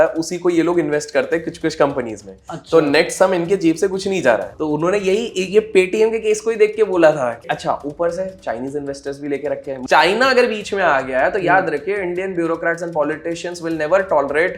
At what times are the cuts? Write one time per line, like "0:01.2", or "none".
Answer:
0:04.5
0:07.4
0:09.8